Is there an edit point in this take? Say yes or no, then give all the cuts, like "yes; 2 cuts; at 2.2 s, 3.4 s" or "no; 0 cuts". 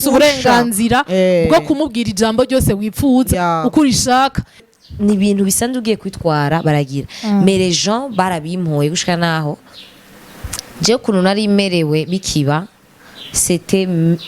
yes; 1 cut; at 4.6 s